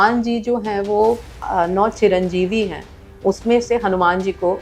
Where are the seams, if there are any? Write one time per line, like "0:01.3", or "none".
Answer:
0:01.4